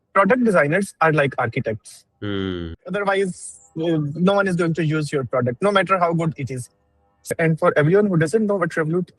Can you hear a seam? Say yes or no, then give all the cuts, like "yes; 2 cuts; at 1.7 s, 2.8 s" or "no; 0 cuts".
yes; 2 cuts; at 2.9 s, 7.4 s